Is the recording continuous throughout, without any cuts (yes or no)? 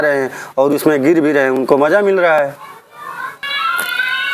yes